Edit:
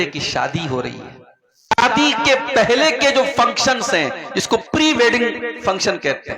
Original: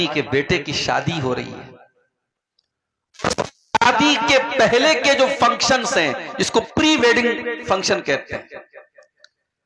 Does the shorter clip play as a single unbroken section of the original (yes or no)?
no